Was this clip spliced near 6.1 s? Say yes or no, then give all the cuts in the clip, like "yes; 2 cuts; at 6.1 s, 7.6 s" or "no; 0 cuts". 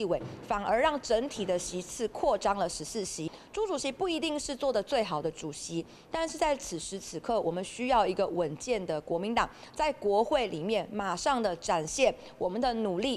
no; 1 cut; at 3.4 s